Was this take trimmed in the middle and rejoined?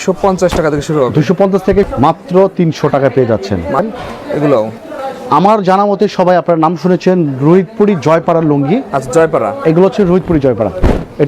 yes; 2 cuts; at 1.9 s, 3.8 s

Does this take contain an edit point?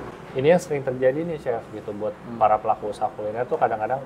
no; 0 cuts

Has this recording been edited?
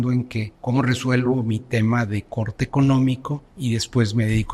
no; 0 cuts

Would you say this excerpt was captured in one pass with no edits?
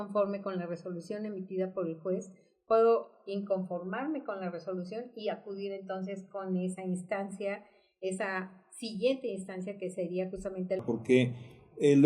no; 1 cut; at 10.8 s

